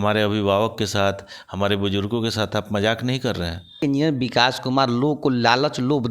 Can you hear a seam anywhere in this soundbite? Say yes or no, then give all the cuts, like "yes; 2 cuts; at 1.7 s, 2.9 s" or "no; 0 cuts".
yes; 1 cut; at 3.8 s